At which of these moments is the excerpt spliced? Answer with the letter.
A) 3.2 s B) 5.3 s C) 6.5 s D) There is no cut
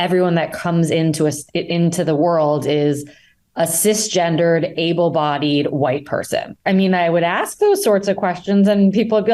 C